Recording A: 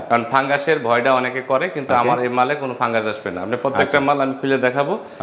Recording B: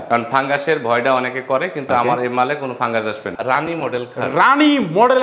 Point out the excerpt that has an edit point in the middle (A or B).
B